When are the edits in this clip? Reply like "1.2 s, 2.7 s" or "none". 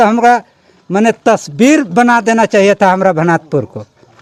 none